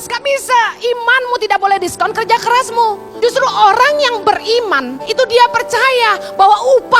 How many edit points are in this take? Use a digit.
2